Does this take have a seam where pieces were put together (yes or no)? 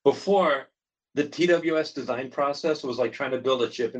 no